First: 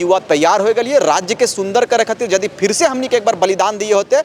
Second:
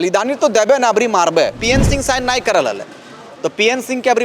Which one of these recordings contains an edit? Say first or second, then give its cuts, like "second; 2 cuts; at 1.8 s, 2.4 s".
second; 1 cut; at 1.6 s